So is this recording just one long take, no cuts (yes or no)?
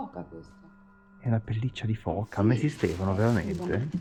yes